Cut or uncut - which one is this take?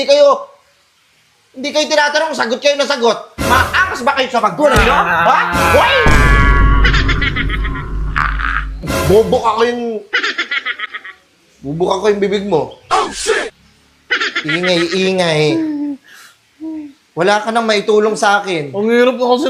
uncut